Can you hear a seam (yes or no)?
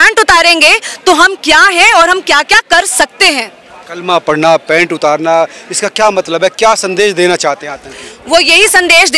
no